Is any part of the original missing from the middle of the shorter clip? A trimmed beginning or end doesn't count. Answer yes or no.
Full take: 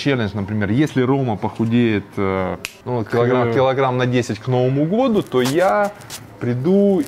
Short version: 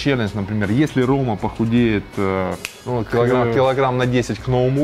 no